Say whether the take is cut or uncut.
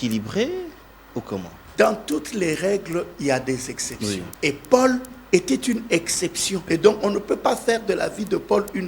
cut